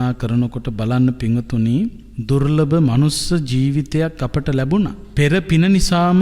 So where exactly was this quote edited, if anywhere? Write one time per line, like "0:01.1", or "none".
0:02.1
0:05.0